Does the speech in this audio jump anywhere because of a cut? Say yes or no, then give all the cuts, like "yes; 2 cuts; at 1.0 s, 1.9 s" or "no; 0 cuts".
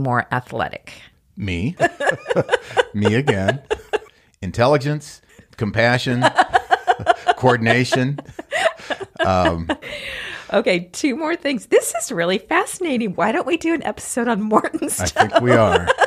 yes; 1 cut; at 9.9 s